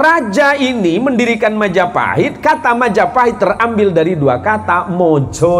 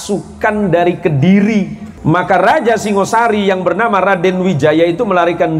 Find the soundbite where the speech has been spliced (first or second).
second